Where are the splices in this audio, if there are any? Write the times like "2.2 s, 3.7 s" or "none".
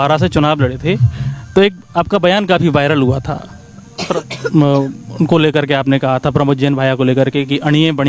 none